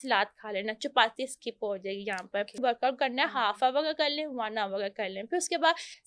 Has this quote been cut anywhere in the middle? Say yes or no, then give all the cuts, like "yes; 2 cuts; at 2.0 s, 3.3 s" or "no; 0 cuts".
yes; 1 cut; at 2.6 s